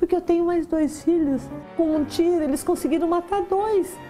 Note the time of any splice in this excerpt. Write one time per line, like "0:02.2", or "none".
0:01.6